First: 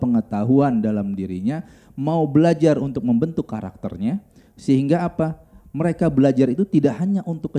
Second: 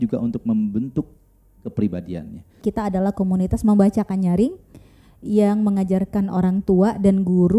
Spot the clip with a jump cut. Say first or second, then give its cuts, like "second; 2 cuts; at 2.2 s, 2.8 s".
second; 1 cut; at 2.6 s